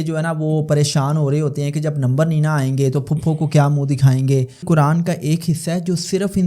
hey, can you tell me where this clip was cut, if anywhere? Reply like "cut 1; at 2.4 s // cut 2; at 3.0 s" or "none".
cut 1; at 4.6 s